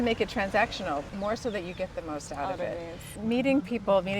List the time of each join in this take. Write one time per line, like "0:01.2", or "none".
0:01.1
0:03.1